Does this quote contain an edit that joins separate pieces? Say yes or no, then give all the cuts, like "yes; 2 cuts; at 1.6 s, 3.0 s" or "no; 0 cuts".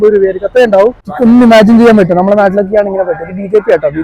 yes; 1 cut; at 1.0 s